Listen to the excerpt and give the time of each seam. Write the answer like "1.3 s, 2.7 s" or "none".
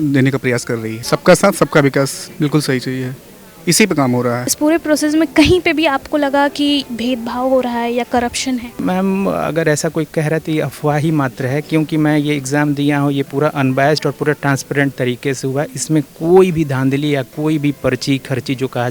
0.9 s, 4.4 s, 8.7 s